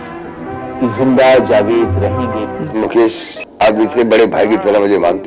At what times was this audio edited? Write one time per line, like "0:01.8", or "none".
0:02.7